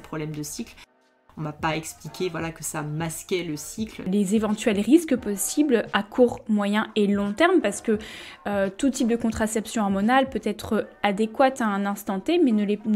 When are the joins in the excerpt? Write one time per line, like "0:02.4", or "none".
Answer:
0:01.1
0:04.1